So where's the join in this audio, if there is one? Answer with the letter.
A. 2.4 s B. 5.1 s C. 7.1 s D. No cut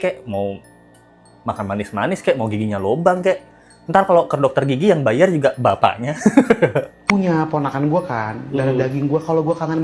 C